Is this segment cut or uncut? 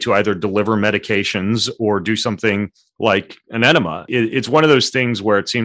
cut